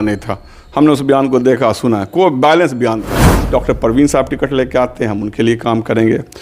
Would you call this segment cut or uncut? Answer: cut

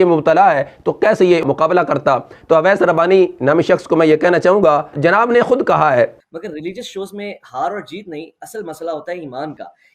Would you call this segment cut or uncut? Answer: cut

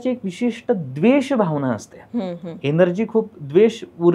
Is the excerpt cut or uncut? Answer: uncut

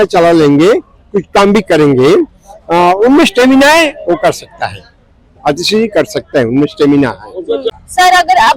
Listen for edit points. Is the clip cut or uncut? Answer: uncut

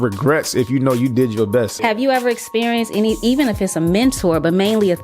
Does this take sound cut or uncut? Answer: cut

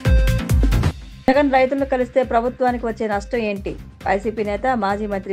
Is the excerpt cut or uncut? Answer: cut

